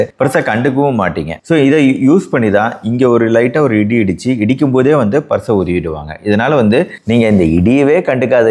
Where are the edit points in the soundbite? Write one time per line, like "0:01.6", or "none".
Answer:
none